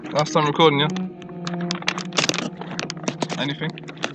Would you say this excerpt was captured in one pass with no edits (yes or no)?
yes